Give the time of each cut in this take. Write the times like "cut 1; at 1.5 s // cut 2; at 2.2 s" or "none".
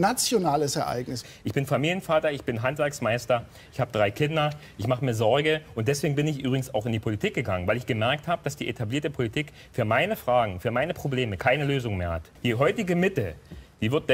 cut 1; at 1.3 s // cut 2; at 12.4 s